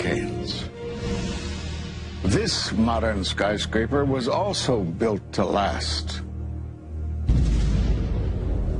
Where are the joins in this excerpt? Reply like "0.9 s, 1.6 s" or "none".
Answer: 4.6 s